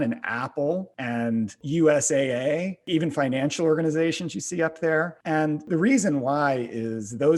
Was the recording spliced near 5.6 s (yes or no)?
yes